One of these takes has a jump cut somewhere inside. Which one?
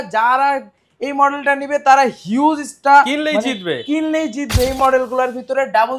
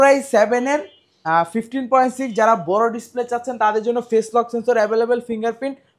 first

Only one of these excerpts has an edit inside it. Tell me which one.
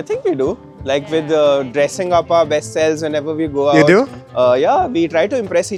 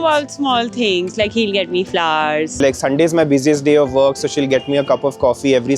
second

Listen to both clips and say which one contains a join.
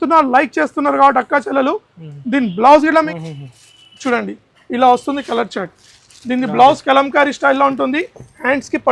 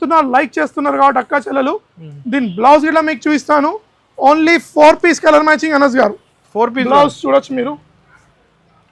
first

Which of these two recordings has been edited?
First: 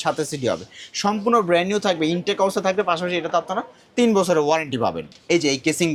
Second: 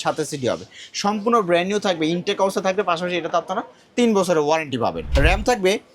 second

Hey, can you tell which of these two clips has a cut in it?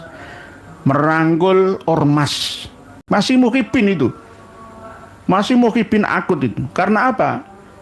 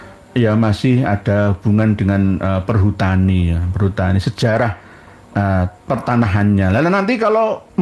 first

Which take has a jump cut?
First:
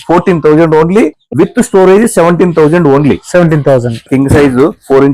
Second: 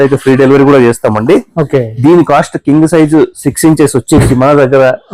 first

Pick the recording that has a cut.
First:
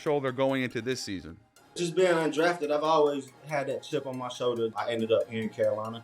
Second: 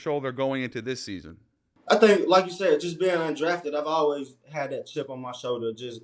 first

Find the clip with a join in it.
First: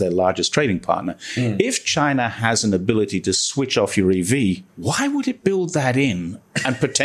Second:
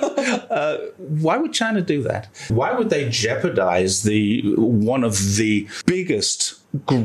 second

